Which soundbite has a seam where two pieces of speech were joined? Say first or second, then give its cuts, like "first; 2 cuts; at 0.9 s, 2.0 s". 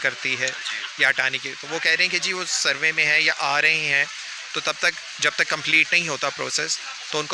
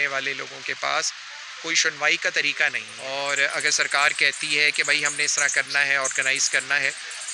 second; 1 cut; at 2.9 s